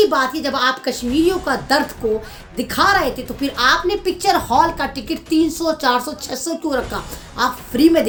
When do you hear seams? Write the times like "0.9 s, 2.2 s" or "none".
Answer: none